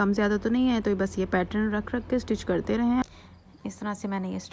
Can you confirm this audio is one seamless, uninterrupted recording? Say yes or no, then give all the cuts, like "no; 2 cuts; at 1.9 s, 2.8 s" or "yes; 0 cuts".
no; 1 cut; at 3.0 s